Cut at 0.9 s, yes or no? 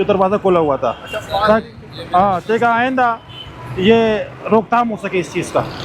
no